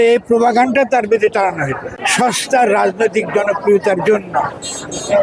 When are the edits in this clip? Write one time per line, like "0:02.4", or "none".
0:02.0